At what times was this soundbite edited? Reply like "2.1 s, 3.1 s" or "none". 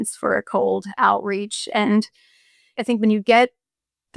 2.7 s